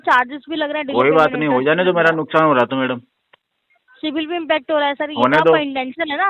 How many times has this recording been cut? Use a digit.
0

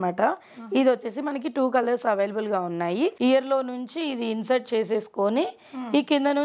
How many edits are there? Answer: 1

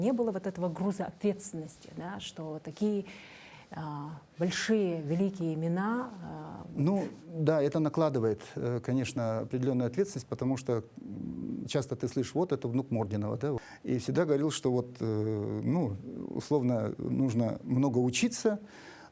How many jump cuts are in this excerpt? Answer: 1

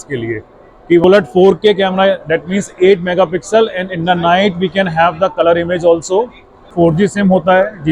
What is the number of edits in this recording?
2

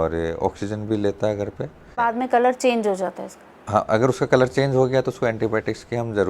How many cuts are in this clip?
1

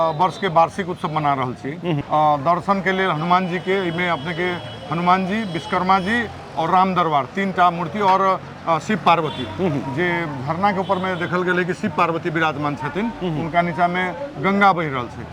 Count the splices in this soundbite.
1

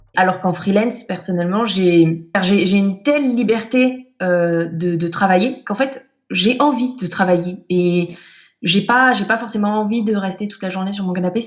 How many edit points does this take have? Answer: 1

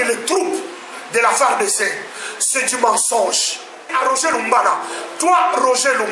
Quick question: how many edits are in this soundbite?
1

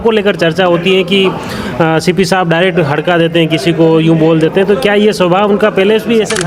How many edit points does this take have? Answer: 0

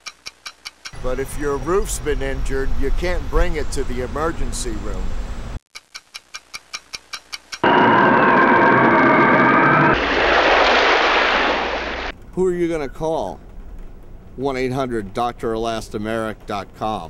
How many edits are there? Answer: 0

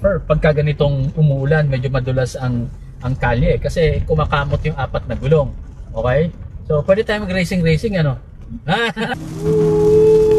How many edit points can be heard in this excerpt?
1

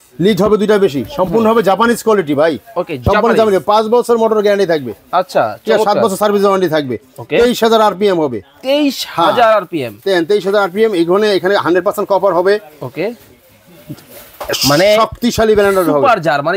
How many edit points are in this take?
0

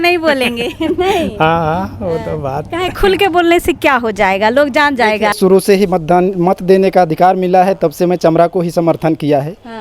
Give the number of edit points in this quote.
1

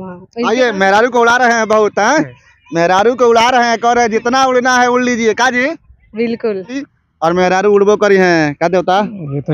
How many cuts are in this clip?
1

